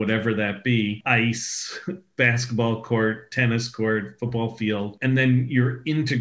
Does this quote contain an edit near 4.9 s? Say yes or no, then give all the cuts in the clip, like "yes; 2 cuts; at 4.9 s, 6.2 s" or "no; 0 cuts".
yes; 2 cuts; at 1.0 s, 4.9 s